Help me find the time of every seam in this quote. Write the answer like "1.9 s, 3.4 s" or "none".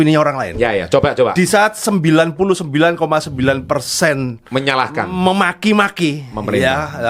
none